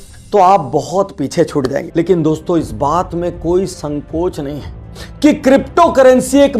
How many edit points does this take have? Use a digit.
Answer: 1